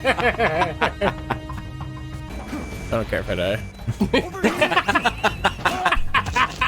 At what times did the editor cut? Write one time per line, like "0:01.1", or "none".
0:02.3